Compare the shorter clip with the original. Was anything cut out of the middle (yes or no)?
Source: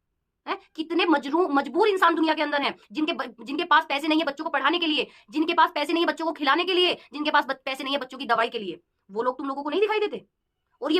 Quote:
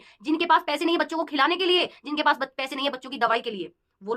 no